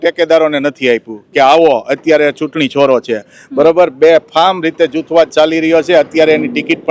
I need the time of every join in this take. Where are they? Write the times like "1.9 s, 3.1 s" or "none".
none